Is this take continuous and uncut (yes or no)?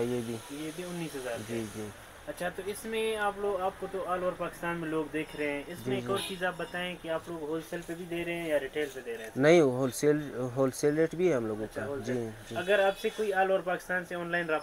yes